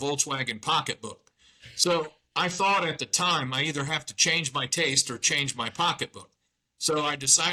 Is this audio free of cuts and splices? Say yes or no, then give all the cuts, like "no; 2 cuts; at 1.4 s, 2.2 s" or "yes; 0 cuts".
yes; 0 cuts